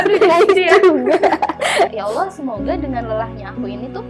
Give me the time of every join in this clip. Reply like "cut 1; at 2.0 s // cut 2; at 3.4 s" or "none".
cut 1; at 1.9 s